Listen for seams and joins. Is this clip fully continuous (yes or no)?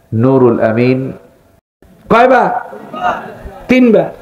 no